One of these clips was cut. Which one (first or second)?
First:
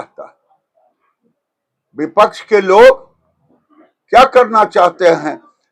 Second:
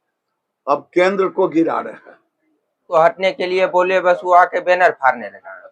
second